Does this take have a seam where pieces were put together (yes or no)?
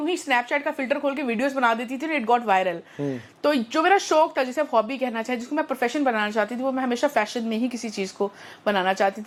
no